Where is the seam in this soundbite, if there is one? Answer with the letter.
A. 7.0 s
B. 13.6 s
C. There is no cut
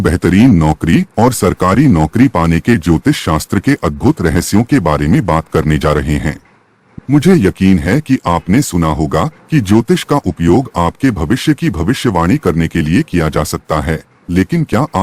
A